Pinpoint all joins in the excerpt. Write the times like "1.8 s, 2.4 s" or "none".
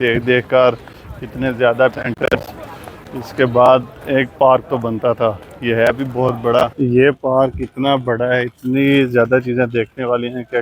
2.0 s, 6.7 s